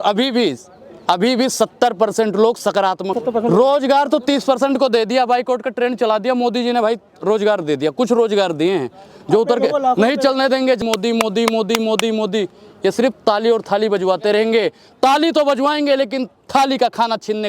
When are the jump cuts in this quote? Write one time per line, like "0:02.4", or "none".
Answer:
0:03.2
0:10.8